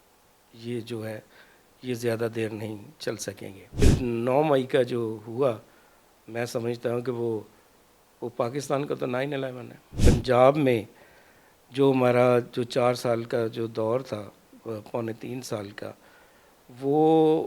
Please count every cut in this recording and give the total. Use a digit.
2